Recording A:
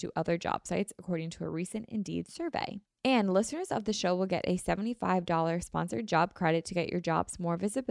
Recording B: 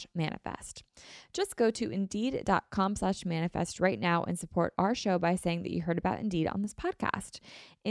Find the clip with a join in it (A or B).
A